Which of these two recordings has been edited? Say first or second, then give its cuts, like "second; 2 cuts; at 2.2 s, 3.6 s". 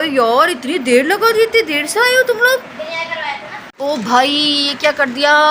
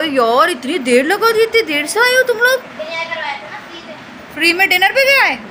first; 1 cut; at 3.7 s